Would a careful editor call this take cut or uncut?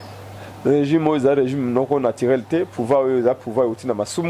uncut